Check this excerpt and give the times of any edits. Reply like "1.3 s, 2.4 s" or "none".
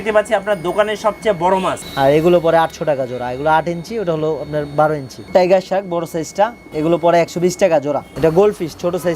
1.8 s, 5.2 s, 6.6 s, 8.1 s